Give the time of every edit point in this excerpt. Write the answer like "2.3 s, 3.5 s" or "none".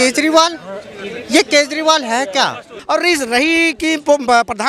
2.7 s